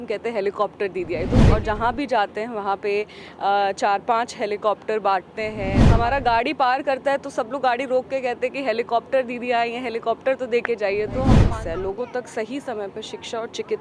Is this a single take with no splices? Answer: no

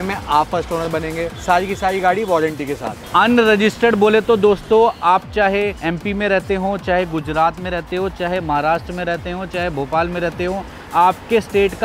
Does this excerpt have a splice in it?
yes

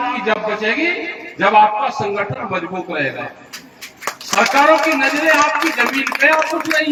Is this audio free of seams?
yes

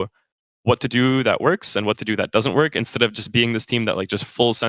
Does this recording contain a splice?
no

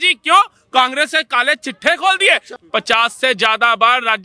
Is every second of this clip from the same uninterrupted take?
no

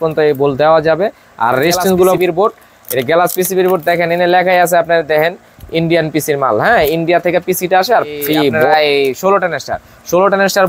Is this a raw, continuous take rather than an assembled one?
no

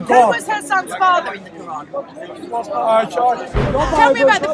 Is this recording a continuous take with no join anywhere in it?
no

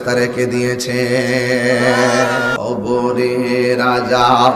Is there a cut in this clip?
yes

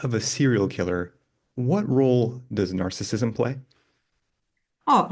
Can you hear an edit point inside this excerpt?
no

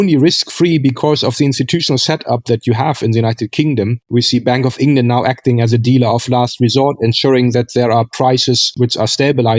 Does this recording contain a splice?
no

